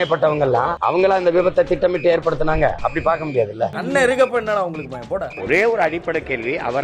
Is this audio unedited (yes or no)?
no